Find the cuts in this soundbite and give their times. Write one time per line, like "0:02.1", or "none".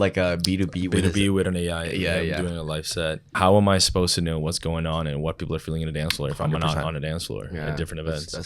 0:03.3